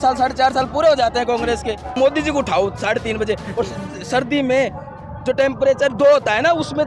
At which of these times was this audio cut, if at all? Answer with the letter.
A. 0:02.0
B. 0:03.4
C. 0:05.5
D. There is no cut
A